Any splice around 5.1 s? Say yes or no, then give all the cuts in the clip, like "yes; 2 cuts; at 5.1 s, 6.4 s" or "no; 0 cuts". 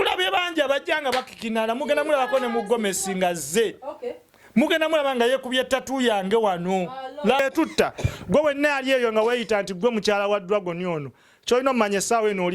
no; 1 cut; at 7.4 s